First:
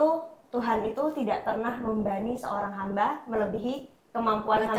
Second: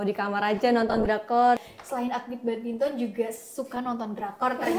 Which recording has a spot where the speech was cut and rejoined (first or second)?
second